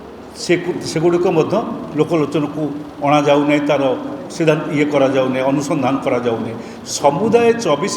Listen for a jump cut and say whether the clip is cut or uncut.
uncut